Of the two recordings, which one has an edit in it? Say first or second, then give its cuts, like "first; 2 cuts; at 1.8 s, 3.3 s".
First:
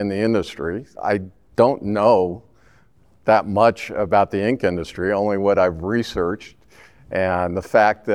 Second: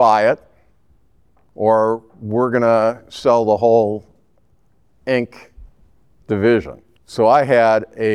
second; 1 cut; at 6.8 s